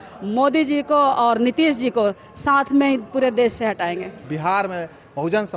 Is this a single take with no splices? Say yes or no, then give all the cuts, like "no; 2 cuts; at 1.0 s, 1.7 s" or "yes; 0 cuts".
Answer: no; 1 cut; at 4.3 s